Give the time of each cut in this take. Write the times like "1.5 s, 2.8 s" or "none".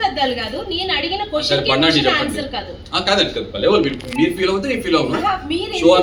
none